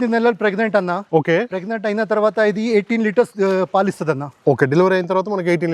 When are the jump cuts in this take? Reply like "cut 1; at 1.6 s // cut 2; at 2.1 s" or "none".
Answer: none